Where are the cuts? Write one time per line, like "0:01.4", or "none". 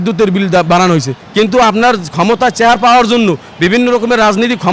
0:01.2